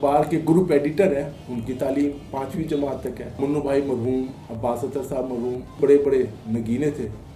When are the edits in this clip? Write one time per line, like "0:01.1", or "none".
0:03.4
0:05.8